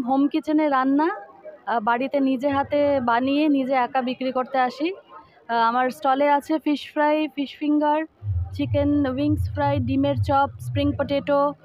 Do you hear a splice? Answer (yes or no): no